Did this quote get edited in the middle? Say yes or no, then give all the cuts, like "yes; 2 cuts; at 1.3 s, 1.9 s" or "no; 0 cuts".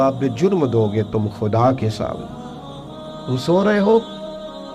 no; 0 cuts